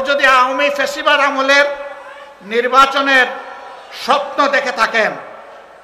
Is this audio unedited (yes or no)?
yes